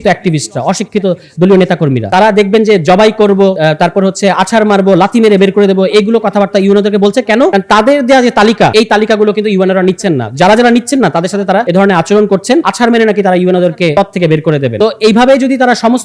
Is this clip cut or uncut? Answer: cut